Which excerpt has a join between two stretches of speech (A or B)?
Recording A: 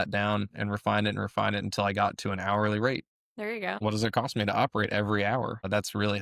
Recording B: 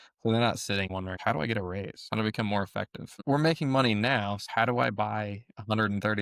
B